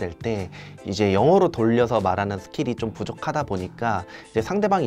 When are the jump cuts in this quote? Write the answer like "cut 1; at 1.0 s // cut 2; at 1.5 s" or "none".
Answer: none